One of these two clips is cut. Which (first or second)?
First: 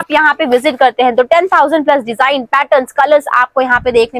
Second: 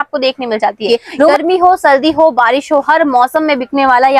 second